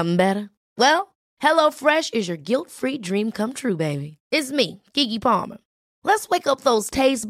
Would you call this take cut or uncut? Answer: uncut